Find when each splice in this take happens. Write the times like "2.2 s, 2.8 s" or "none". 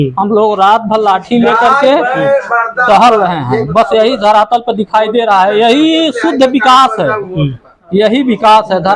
none

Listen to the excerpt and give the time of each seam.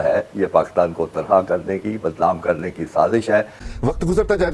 3.6 s

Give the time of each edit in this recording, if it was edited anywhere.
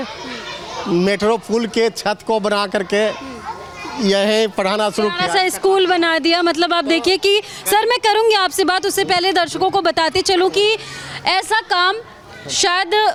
none

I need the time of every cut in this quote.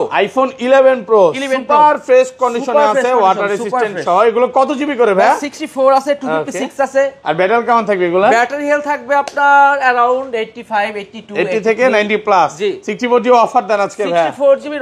none

